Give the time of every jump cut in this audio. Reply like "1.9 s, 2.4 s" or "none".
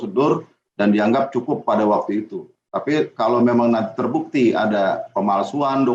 none